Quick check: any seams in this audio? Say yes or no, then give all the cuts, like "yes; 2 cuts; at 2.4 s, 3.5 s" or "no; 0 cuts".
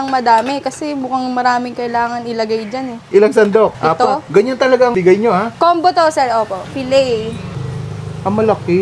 yes; 3 cuts; at 3.8 s, 5.2 s, 6.7 s